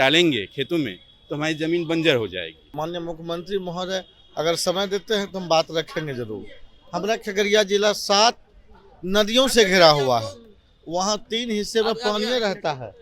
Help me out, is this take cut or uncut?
cut